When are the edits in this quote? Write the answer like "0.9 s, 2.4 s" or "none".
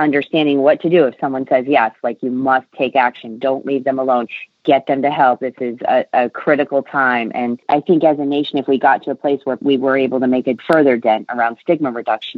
7.6 s, 9.6 s, 10.6 s